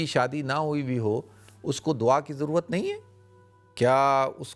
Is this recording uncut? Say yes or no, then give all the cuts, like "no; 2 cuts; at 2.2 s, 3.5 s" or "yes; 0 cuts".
yes; 0 cuts